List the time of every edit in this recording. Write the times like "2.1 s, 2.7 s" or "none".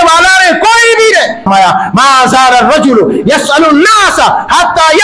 1.5 s